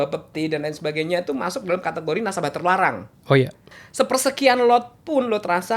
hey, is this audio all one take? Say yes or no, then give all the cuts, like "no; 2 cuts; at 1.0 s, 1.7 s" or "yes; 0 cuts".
no; 1 cut; at 3.7 s